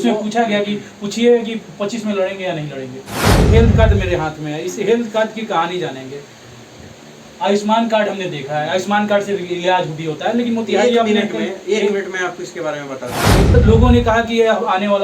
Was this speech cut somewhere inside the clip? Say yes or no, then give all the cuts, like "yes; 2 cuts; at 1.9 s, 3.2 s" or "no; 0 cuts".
yes; 2 cuts; at 3.5 s, 13.5 s